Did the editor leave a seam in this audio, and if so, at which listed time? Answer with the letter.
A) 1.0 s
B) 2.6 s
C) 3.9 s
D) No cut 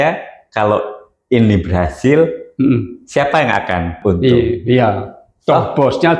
C